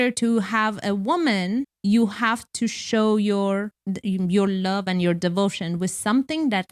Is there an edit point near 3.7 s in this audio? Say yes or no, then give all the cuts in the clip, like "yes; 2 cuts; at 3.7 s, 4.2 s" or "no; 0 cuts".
yes; 2 cuts; at 1.7 s, 3.7 s